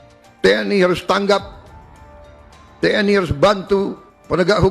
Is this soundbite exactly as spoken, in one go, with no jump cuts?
yes; 0 cuts

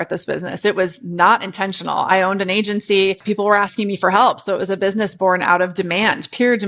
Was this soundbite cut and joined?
yes; 1 cut; at 3.2 s

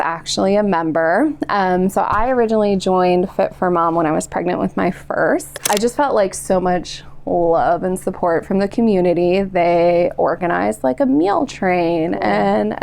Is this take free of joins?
no; 1 cut; at 5.5 s

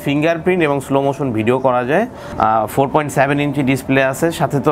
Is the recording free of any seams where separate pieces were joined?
no; 1 cut; at 2.2 s

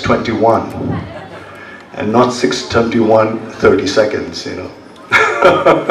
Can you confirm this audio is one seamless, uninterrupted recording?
yes; 0 cuts

